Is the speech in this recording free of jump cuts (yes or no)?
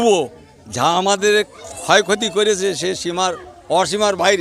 yes